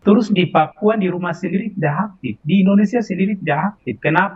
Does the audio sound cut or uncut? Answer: uncut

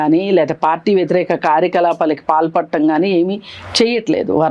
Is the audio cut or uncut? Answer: uncut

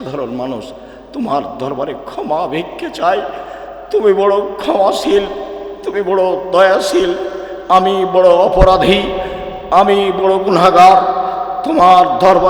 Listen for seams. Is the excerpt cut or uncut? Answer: uncut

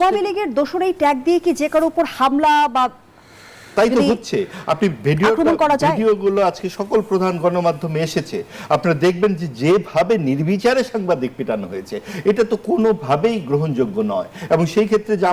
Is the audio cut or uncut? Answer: uncut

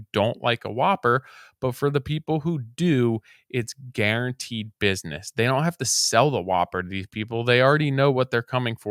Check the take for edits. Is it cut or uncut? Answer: uncut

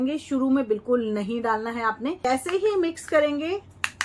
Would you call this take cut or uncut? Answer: cut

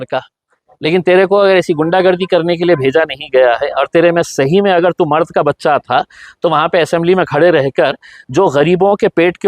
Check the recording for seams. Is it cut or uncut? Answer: uncut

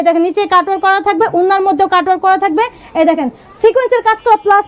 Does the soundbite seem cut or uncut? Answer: uncut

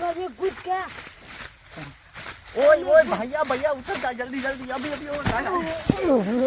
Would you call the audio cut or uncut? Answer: uncut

